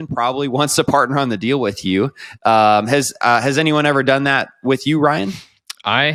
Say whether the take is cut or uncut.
uncut